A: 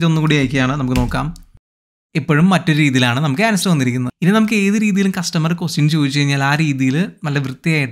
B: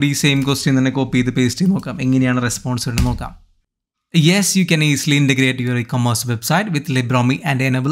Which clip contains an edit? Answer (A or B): A